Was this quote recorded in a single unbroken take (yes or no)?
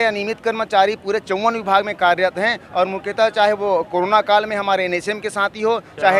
yes